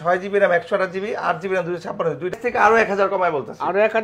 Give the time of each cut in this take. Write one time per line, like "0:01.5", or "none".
0:02.3